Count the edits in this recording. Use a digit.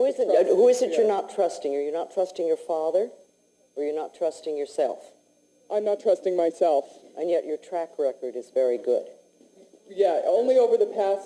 0